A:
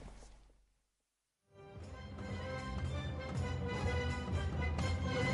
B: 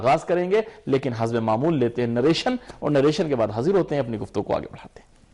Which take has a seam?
B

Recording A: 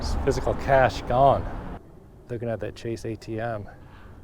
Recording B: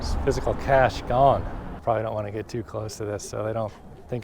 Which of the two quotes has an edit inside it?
A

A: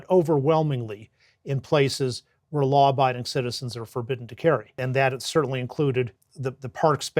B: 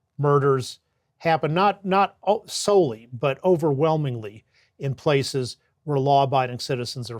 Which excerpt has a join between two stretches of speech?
A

